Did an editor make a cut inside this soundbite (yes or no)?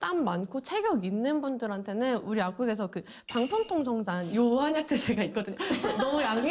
no